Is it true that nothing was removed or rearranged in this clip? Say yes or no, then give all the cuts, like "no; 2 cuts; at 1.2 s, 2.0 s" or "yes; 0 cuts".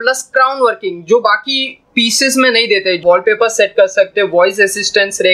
no; 1 cut; at 3.0 s